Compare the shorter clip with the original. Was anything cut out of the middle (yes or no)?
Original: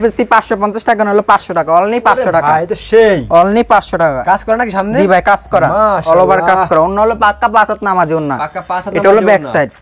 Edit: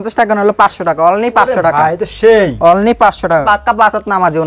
yes